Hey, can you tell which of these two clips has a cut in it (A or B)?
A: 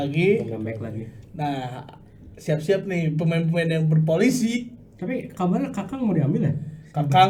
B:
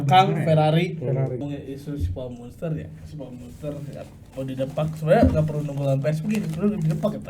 B